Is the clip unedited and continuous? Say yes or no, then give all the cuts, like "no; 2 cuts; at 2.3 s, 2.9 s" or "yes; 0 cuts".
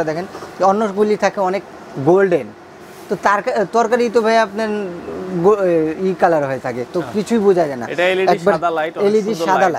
yes; 0 cuts